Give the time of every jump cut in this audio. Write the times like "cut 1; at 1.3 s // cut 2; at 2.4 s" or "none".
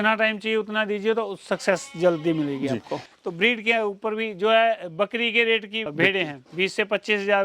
cut 1; at 3.0 s // cut 2; at 5.9 s